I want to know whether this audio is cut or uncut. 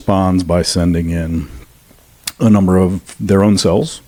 uncut